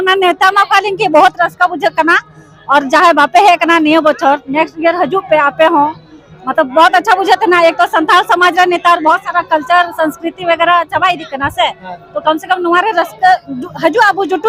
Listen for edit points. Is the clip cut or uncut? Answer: uncut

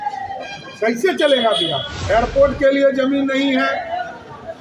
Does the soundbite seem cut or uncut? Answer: cut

